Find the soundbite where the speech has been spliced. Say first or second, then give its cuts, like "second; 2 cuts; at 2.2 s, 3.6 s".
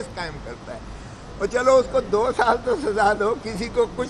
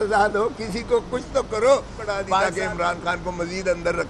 second; 1 cut; at 2.4 s